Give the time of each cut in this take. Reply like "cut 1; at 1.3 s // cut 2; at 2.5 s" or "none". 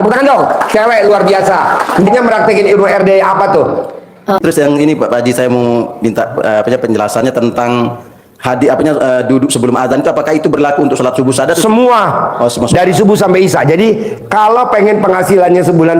cut 1; at 4.4 s